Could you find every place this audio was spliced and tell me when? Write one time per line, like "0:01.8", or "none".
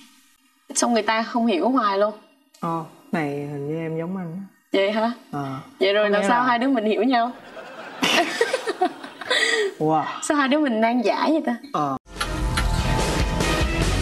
0:12.0